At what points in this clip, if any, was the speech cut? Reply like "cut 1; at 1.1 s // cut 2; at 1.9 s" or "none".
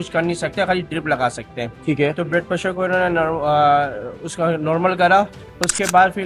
none